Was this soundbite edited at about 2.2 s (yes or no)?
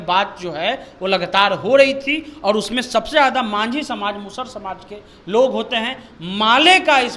no